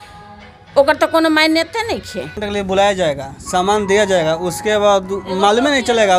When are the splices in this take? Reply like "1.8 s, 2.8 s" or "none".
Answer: 2.4 s